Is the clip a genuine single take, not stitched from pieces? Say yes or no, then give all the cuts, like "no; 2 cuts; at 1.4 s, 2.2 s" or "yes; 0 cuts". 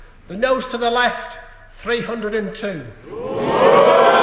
yes; 0 cuts